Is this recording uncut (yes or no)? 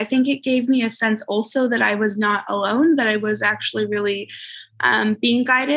yes